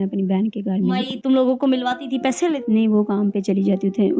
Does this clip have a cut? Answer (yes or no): yes